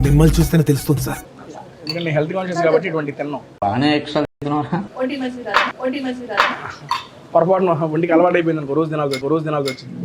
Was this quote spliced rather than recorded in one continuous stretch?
yes; 1 cut; at 1.2 s

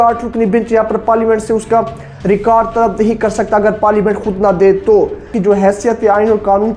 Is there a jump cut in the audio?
yes; 1 cut; at 5.3 s

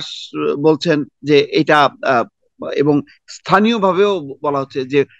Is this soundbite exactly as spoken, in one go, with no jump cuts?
yes; 0 cuts

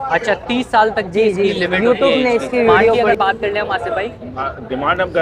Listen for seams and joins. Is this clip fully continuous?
no; 1 cut; at 3.0 s

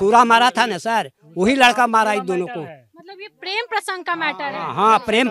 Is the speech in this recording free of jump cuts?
yes; 0 cuts

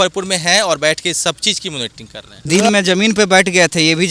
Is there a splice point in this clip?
no; 0 cuts

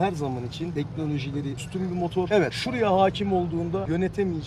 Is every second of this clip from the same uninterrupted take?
yes; 0 cuts

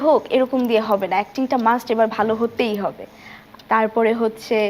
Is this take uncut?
yes; 0 cuts

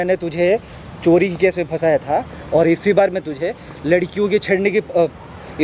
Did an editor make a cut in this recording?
no; 0 cuts

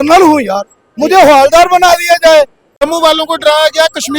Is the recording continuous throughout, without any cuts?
no; 1 cut; at 2.9 s

